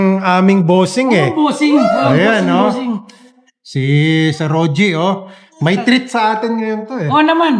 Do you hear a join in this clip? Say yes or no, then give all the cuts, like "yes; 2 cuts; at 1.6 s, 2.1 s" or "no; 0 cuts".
no; 0 cuts